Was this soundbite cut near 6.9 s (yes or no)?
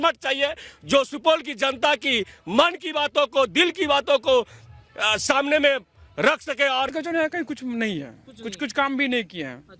yes